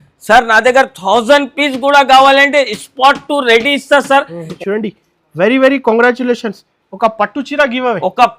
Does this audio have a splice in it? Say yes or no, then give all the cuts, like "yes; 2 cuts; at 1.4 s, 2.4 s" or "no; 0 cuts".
yes; 1 cut; at 4.5 s